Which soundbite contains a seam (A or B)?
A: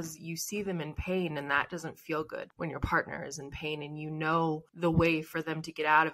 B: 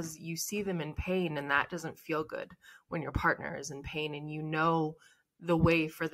A